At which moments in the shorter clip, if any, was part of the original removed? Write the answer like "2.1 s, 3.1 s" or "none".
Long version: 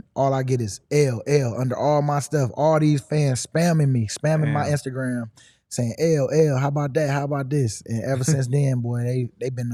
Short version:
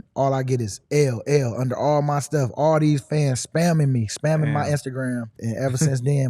5.4 s